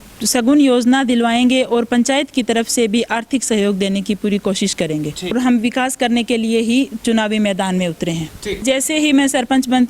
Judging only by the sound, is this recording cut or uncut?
cut